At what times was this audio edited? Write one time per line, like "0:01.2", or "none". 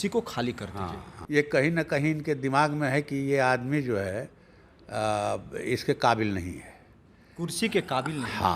0:01.1